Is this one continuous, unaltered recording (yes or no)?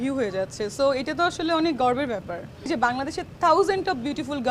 no